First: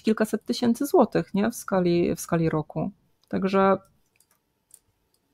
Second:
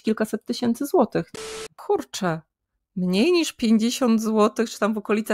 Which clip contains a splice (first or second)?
second